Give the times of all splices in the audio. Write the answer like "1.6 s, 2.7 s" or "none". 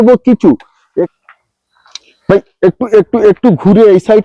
1.1 s